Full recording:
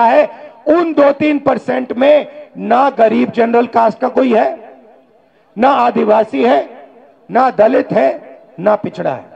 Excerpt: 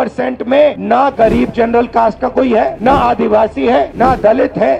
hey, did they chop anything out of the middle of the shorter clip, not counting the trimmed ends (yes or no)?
yes